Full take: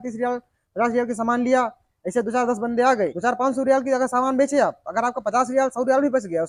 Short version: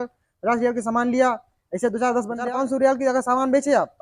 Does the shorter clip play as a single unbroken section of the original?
no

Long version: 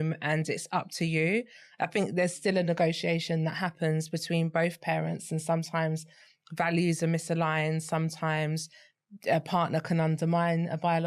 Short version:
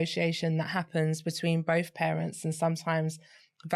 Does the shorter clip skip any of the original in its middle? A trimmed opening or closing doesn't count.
no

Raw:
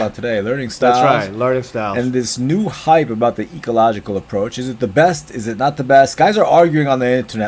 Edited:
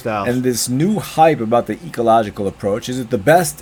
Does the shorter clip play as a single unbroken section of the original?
yes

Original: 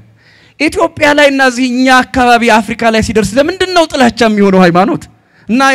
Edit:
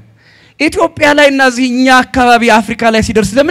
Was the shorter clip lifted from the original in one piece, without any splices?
yes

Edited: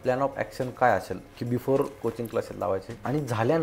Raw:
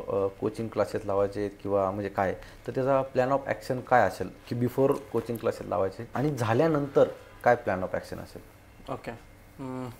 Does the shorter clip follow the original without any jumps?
yes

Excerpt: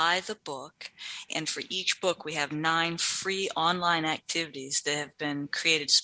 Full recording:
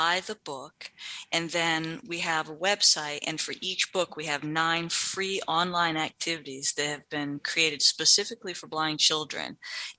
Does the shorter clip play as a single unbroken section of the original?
no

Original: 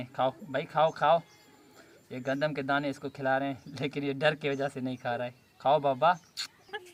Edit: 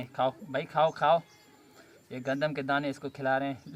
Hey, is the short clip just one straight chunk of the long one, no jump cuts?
yes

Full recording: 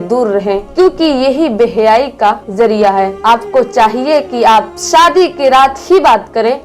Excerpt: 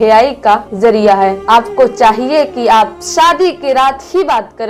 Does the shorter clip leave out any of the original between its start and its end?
no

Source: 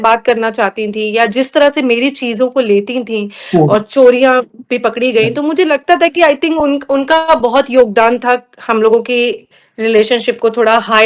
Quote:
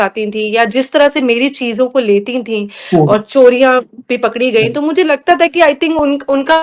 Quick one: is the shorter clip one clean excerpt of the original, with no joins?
yes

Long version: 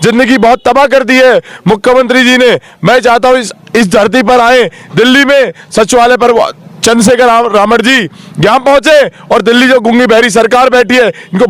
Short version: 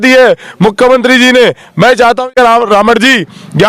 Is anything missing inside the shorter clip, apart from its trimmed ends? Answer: yes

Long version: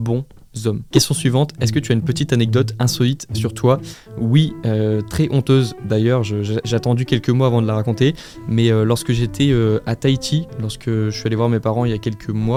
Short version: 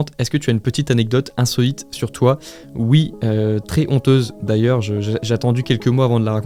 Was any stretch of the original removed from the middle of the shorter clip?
no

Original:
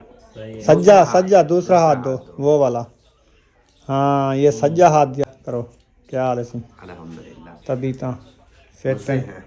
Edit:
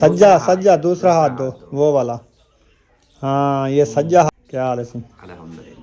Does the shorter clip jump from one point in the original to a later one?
yes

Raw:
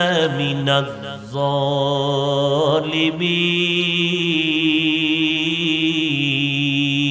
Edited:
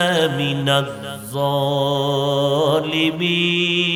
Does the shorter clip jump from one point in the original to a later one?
no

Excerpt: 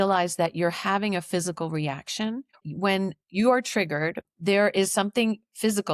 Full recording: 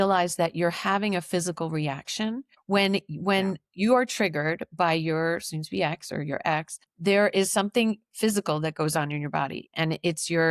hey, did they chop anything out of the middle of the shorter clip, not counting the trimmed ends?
yes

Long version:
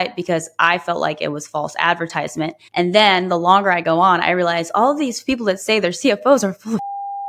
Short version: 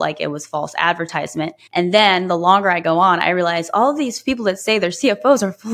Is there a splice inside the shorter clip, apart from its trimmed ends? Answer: no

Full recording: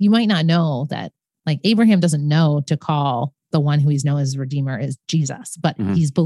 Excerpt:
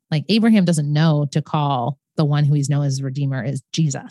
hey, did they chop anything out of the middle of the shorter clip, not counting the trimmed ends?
no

